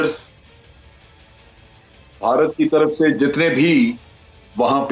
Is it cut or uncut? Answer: uncut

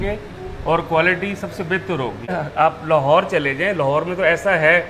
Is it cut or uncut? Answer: cut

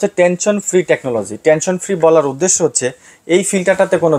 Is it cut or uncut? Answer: uncut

